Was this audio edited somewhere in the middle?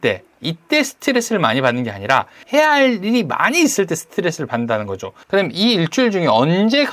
yes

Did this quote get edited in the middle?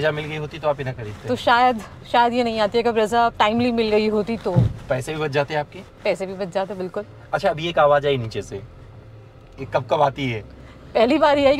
no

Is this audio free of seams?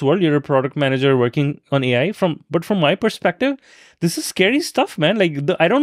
yes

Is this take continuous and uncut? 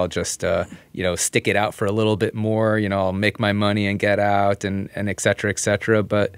yes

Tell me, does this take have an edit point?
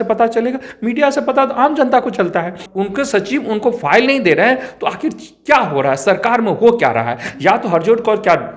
yes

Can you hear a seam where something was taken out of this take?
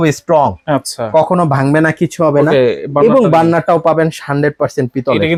no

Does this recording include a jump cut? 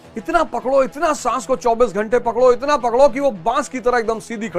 no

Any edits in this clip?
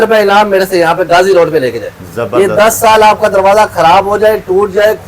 yes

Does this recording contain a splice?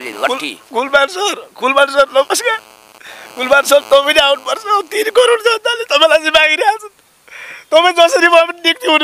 no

